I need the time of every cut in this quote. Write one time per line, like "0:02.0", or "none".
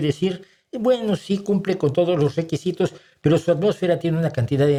none